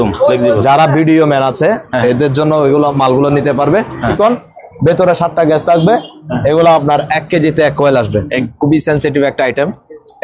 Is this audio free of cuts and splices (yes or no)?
no